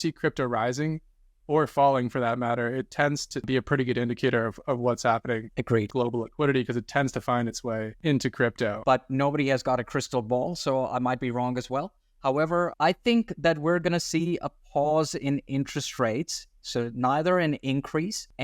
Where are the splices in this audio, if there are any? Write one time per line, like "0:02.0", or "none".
0:08.8